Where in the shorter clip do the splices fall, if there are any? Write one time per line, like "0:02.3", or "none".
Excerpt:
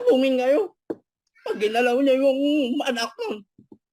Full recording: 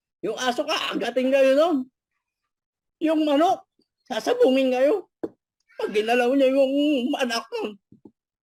none